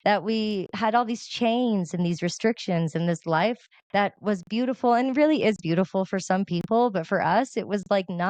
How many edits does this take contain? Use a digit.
1